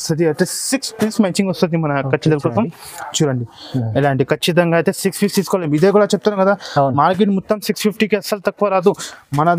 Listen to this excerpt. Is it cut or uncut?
uncut